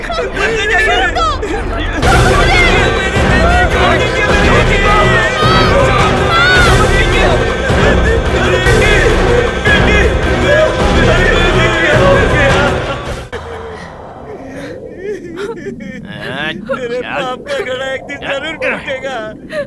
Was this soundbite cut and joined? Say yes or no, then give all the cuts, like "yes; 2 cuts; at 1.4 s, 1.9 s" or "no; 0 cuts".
yes; 1 cut; at 8.7 s